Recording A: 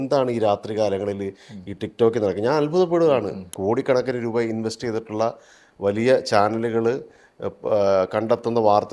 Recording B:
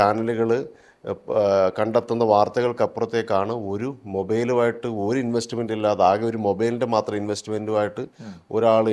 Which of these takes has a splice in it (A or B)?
A